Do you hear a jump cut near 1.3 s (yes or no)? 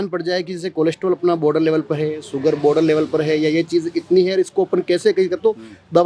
no